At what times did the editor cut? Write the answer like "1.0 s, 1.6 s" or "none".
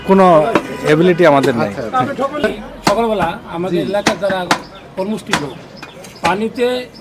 2.5 s